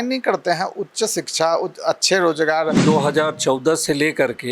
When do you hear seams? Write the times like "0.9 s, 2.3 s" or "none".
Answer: 2.8 s

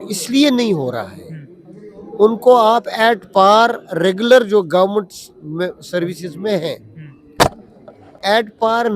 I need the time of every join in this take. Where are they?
none

